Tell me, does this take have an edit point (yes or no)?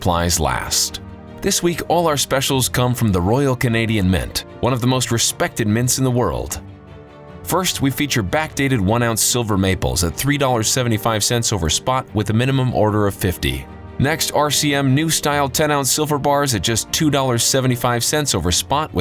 no